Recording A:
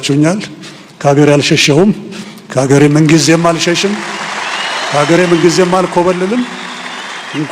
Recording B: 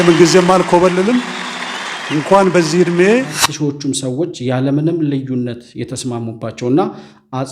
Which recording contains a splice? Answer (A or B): B